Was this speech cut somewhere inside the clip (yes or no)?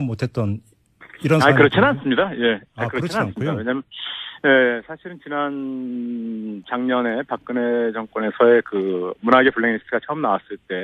yes